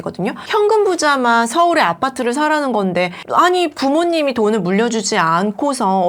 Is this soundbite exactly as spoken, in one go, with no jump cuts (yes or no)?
yes